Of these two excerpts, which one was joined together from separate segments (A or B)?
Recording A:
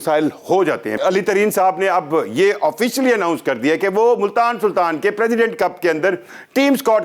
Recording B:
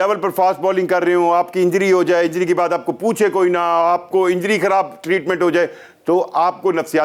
A